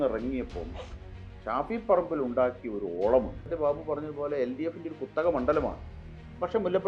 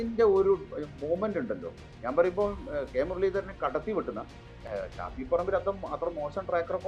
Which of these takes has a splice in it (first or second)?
first